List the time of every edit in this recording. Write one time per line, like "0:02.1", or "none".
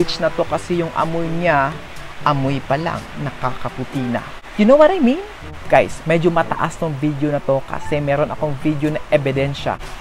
none